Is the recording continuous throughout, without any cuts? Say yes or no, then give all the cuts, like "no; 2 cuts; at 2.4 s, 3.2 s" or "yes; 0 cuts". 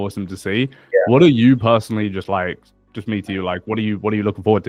yes; 0 cuts